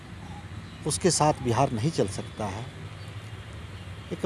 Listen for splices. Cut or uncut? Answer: uncut